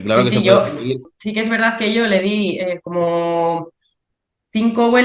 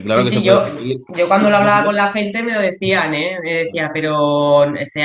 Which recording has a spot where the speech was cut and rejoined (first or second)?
first